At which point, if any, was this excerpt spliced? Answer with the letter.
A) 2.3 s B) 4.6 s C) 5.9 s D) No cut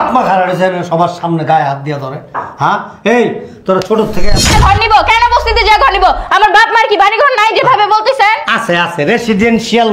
B